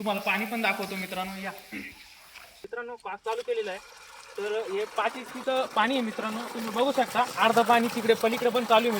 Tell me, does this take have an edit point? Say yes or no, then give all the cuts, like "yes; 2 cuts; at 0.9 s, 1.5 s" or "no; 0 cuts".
yes; 1 cut; at 2.7 s